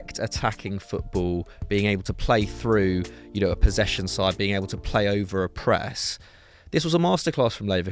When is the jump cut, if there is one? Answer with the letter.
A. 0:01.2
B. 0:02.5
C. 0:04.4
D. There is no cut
D